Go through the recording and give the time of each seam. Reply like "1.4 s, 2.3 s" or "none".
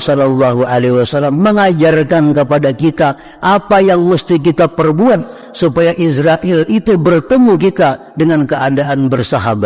none